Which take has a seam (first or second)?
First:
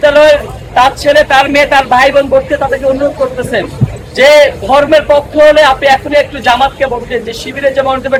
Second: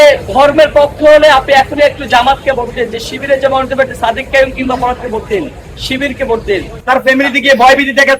second